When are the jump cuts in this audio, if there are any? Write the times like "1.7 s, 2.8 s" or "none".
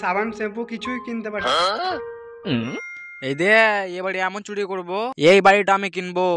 2.6 s